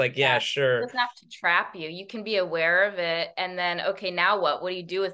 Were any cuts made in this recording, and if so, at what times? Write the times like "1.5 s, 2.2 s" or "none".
none